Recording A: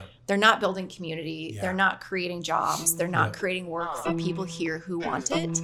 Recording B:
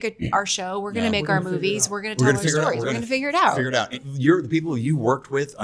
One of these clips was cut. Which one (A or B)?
B